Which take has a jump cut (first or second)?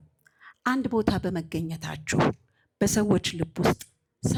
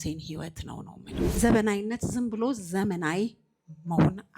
second